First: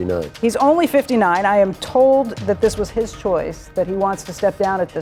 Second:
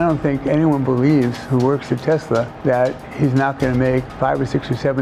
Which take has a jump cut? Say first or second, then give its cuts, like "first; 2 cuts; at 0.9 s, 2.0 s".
second; 2 cuts; at 2.9 s, 4.1 s